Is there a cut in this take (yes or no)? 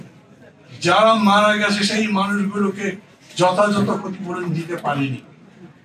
no